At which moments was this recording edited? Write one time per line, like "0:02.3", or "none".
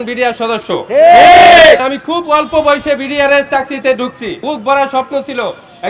0:01.8
0:04.4